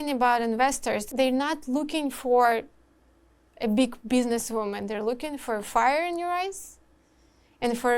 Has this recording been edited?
yes; 1 cut; at 1.1 s

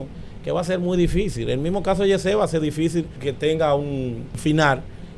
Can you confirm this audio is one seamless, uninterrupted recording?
no; 2 cuts; at 3.1 s, 4.4 s

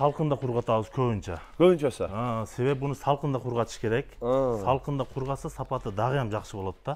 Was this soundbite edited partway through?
no; 0 cuts

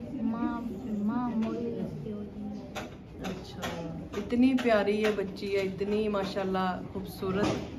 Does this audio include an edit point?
no; 0 cuts

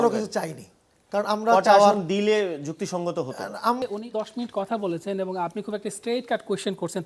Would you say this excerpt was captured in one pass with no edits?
no; 1 cut; at 3.8 s

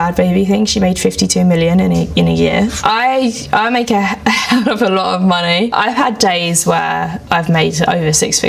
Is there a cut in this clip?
no; 0 cuts

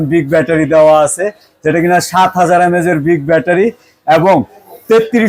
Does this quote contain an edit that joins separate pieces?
no; 0 cuts

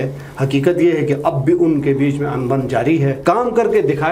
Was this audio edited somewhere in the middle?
yes; 1 cut; at 3.2 s

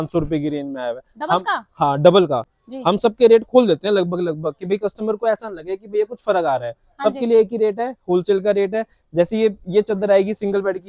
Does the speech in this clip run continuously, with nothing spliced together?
yes; 0 cuts

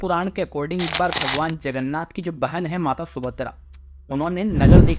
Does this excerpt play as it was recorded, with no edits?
yes; 0 cuts

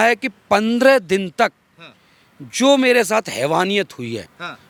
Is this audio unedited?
yes; 0 cuts

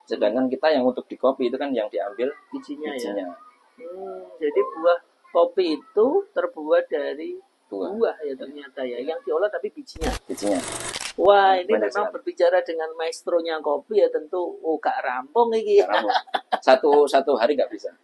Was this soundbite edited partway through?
yes; 1 cut; at 10.8 s

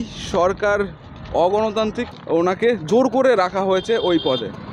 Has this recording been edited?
yes; 1 cut; at 2.1 s

